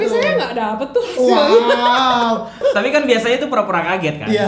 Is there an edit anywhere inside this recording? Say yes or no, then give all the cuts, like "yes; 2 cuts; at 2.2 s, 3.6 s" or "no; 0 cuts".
yes; 1 cut; at 2.6 s